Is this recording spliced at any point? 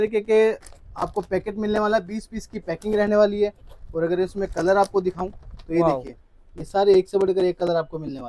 no; 0 cuts

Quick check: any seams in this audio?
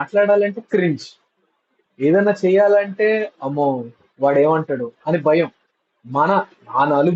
no; 0 cuts

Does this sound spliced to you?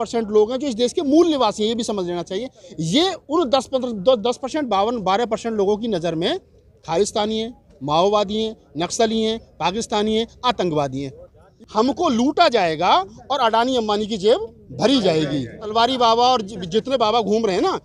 yes; 2 cuts; at 11.5 s, 15.7 s

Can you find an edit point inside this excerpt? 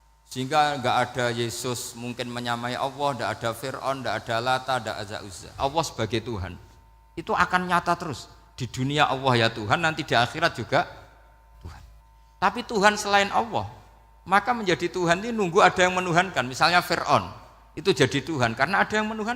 yes; 2 cuts; at 5.6 s, 12.0 s

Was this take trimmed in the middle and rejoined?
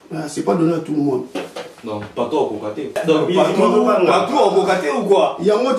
yes; 1 cut; at 3.0 s

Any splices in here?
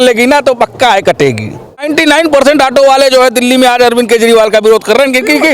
yes; 1 cut; at 1.9 s

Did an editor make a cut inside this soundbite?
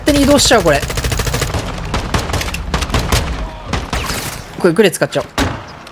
no; 0 cuts

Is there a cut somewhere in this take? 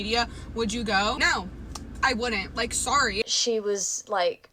yes; 2 cuts; at 1.2 s, 3.2 s

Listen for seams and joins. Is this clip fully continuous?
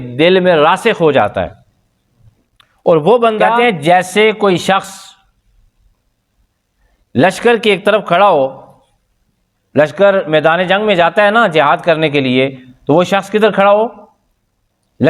no; 1 cut; at 3.5 s

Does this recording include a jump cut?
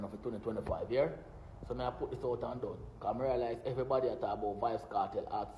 no; 0 cuts

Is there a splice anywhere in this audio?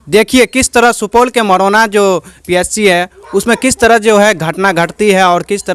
no; 0 cuts

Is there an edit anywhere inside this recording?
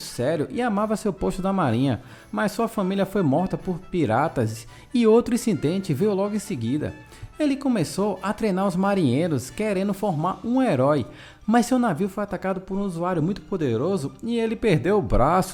no; 0 cuts

